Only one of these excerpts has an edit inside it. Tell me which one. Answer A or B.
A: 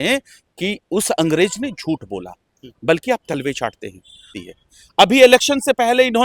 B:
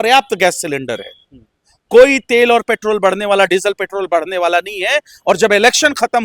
A